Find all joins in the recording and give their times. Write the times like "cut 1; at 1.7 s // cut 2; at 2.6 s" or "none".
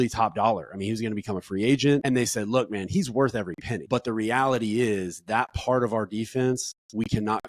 cut 1; at 2.0 s // cut 2; at 3.7 s